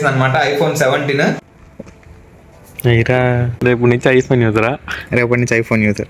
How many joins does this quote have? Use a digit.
2